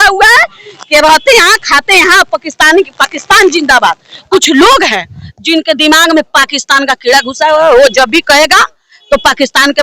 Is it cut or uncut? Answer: cut